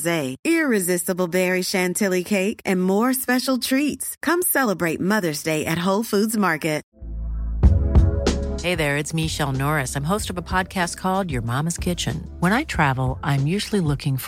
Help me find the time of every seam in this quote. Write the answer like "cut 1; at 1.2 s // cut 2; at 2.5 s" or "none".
cut 1; at 6.9 s

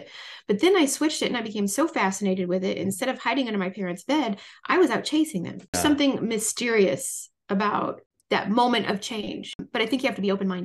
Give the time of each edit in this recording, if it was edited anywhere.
cut 1; at 5.8 s // cut 2; at 8.1 s // cut 3; at 9.7 s

